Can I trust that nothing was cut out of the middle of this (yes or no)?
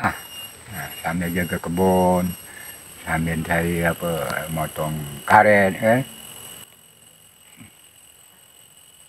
yes